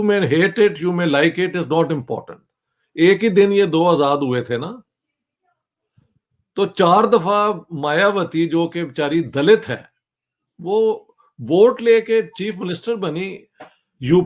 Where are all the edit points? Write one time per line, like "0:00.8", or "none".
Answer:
none